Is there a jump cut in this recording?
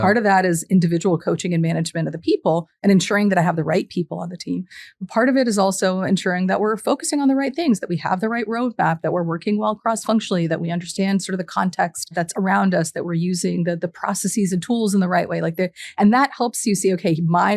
yes; 1 cut; at 12.1 s

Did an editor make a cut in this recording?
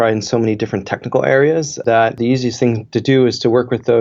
yes; 1 cut; at 1.8 s

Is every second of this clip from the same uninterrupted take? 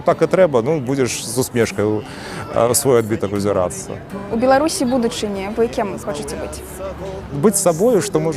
no; 1 cut; at 7.3 s

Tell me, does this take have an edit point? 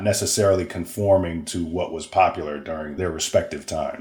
yes; 1 cut; at 2.9 s

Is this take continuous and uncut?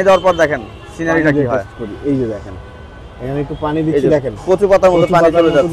yes; 0 cuts

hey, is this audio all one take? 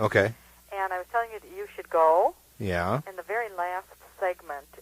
no; 1 cut; at 1.7 s

